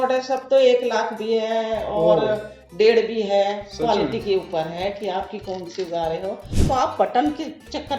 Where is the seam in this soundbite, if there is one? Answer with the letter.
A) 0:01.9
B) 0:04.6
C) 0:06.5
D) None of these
C